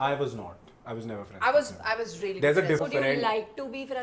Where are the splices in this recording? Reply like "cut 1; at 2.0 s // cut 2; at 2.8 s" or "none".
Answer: cut 1; at 2.8 s